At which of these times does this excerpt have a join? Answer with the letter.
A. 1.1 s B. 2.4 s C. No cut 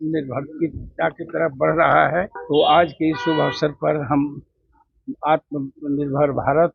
B